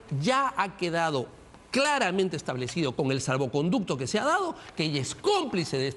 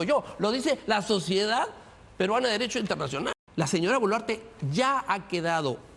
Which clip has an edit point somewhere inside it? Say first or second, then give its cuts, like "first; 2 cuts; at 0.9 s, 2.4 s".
second; 1 cut; at 3.3 s